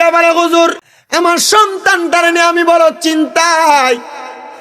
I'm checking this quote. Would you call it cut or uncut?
cut